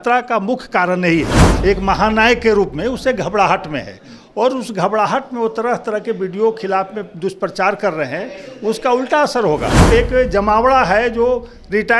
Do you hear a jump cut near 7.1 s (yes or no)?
no